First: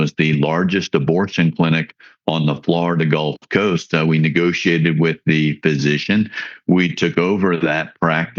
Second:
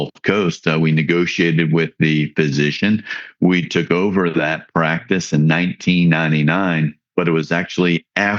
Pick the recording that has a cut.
second; 1 cut; at 7.0 s

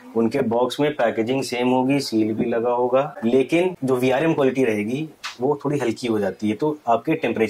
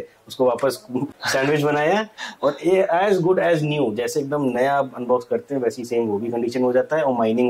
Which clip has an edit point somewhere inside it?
first; 1 cut; at 3.8 s

